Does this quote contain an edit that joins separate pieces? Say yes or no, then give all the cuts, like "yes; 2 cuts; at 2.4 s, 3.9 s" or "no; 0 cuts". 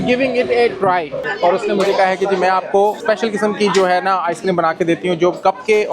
yes; 1 cut; at 1.3 s